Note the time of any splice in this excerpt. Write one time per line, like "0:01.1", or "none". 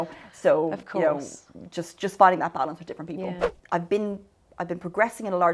0:03.4

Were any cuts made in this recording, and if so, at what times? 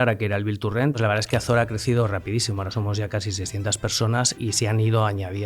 0:01.0
0:04.3

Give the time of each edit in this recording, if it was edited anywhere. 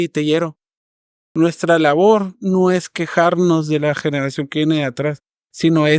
0:01.1

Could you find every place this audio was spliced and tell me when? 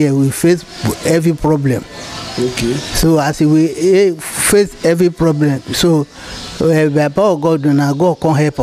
none

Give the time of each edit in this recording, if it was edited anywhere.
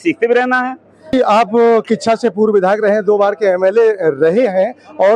0:01.1

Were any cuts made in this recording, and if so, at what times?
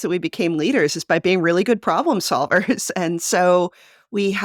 none

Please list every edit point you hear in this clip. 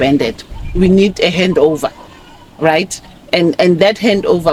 none

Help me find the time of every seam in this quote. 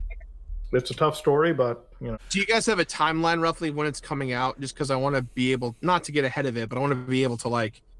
0:02.2

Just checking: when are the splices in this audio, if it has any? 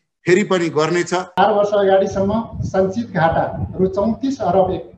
0:01.4

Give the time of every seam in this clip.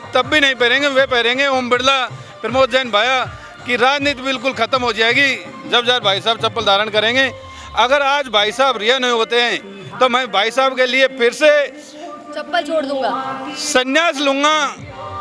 none

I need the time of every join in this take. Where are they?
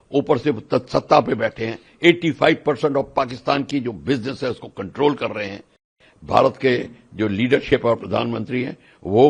0:06.0

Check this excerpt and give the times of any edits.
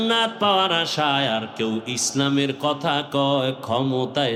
none

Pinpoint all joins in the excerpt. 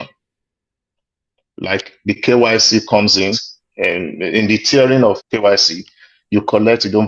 0:03.4

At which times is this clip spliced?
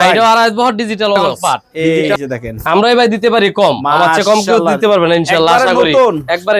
0:01.7

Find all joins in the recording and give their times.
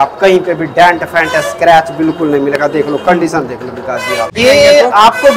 0:04.3

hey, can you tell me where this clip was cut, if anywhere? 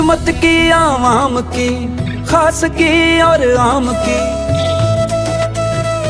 none

